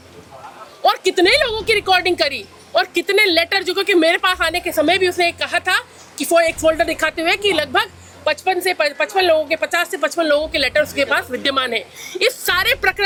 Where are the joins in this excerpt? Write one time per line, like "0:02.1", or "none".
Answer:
none